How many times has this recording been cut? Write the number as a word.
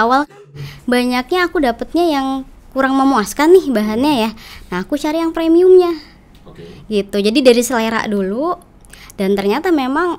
zero